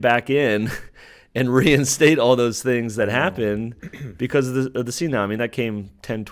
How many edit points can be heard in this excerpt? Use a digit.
0